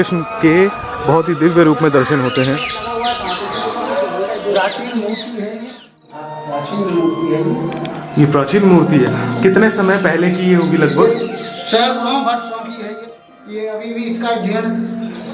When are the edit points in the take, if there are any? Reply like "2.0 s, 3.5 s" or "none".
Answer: 6.4 s, 13.1 s